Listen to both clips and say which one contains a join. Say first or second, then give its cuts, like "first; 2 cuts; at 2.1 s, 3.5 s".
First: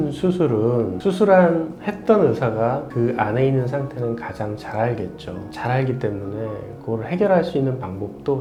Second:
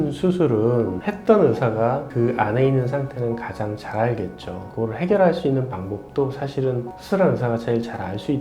second; 2 cuts; at 0.9 s, 4.6 s